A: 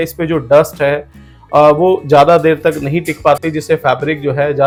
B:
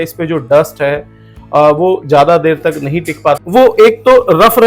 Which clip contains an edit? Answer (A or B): B